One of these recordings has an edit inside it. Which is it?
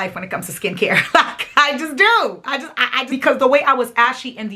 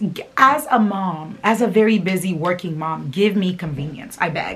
first; 1 cut; at 3.0 s

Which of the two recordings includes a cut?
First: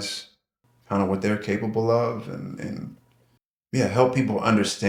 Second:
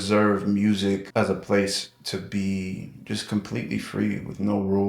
second; 1 cut; at 1.1 s

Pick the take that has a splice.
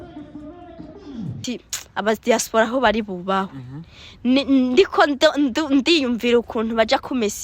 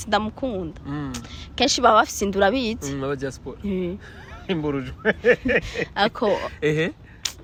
first; 1 cut; at 1.4 s

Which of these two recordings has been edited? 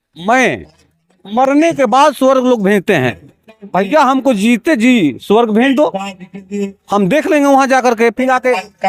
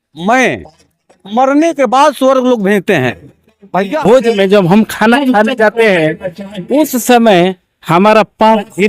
second; 1 cut; at 3.9 s

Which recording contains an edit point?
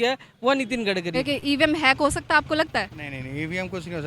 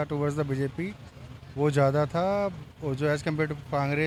first; 1 cut; at 1.1 s

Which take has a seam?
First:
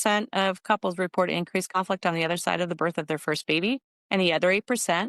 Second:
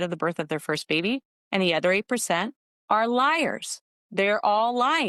first; 1 cut; at 1.7 s

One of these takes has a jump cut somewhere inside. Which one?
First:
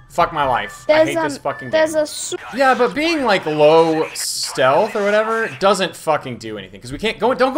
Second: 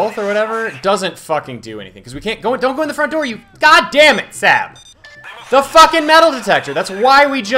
first; 1 cut; at 2.2 s

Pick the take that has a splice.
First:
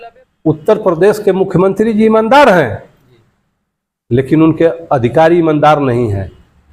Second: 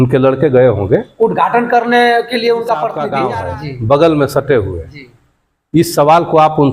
second; 1 cut; at 3.1 s

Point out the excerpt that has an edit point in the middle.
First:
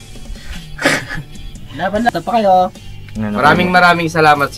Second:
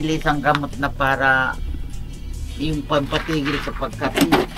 first; 1 cut; at 2.1 s

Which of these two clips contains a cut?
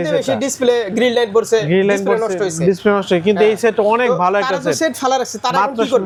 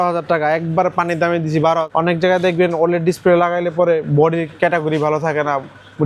second; 1 cut; at 1.9 s

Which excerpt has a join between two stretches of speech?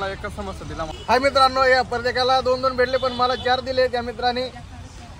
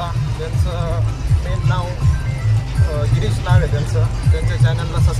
first; 1 cut; at 0.9 s

